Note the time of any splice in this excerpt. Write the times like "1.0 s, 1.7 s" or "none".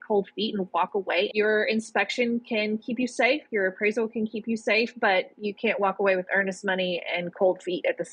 1.3 s